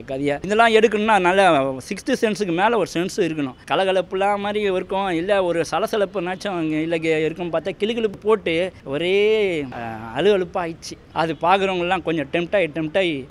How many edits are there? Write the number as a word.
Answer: three